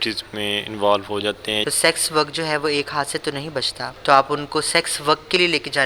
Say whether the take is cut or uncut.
cut